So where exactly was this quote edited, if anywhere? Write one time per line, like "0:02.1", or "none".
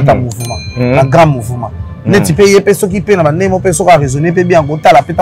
none

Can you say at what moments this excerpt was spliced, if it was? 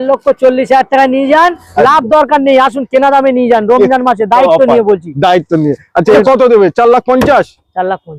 0:01.6
0:06.2

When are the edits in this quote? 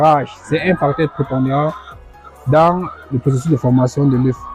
none

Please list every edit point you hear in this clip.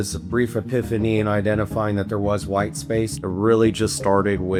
none

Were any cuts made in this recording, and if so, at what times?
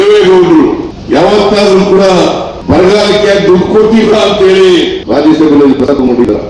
0:00.9
0:02.5
0:05.0

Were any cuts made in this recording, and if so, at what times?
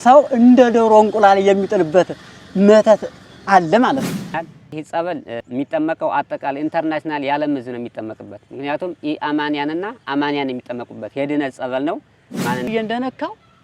0:04.4
0:12.7

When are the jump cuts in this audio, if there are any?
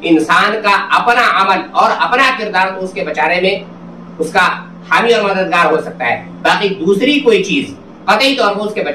none

